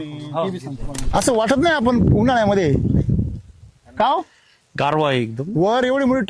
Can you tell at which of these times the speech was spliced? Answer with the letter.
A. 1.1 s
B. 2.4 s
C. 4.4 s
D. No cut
A